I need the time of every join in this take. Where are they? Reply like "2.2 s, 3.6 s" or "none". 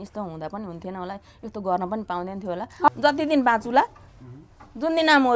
2.9 s